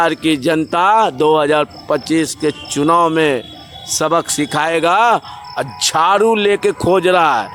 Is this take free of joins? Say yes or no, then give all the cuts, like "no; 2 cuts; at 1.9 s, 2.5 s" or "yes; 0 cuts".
yes; 0 cuts